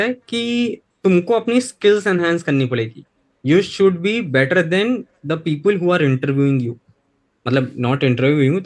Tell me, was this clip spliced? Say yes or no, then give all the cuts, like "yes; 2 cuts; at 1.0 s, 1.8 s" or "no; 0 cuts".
no; 0 cuts